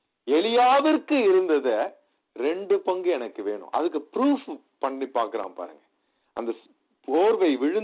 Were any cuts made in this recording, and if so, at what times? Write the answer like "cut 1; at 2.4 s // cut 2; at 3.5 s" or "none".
none